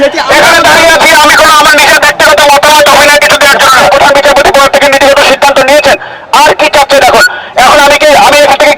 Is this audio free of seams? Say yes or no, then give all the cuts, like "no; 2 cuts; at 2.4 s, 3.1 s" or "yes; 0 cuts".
no; 1 cut; at 3.9 s